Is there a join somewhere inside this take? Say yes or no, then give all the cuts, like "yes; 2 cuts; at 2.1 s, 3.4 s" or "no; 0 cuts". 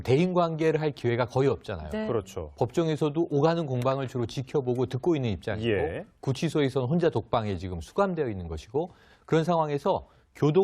yes; 1 cut; at 2.7 s